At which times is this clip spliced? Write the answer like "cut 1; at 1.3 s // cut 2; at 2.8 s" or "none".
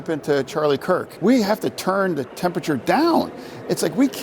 cut 1; at 1.1 s